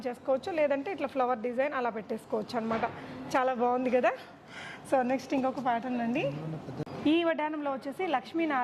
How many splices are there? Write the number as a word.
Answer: zero